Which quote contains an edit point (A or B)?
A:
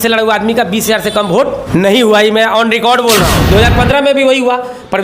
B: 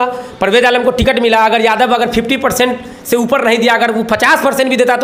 A